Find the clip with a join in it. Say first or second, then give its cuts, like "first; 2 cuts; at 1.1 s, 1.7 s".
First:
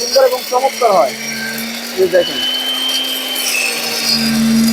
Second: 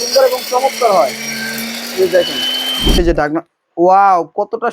second; 1 cut; at 3.0 s